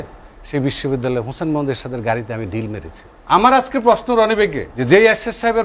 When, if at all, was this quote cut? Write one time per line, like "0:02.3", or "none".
0:03.1
0:04.7